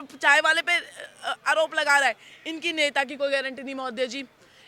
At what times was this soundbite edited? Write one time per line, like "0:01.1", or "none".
none